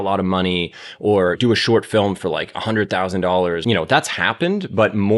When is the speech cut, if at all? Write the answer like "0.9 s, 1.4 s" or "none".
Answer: 1.4 s, 3.6 s